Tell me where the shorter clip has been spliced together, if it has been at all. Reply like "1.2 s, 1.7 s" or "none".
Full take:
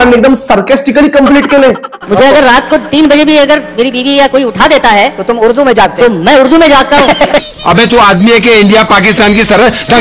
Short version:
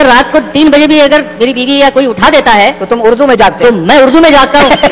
none